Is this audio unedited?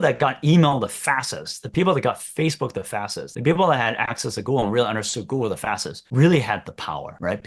yes; 0 cuts

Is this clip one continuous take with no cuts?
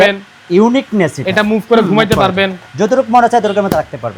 yes; 0 cuts

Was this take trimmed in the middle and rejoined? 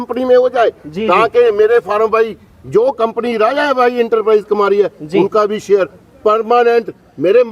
no; 0 cuts

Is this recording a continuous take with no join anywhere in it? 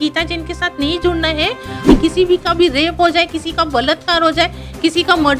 no; 1 cut; at 1.9 s

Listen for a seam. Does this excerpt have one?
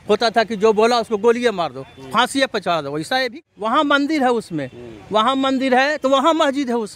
yes; 1 cut; at 3.1 s

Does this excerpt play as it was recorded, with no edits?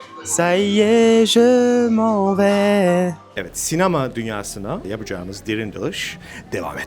no; 2 cuts; at 3.3 s, 4.8 s

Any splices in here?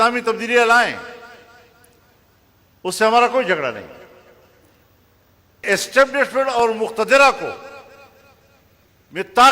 yes; 1 cut; at 5.6 s

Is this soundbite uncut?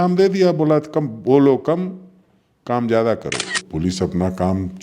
no; 1 cut; at 3.6 s

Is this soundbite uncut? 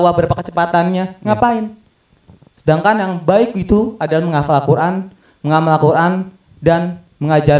yes; 0 cuts

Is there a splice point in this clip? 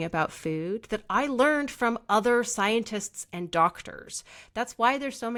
no; 0 cuts

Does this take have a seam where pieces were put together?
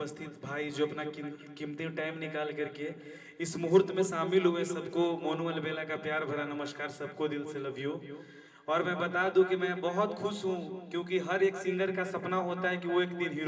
no; 0 cuts

